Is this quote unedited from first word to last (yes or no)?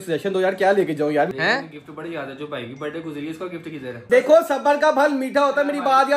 no